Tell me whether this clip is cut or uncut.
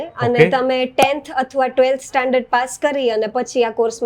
uncut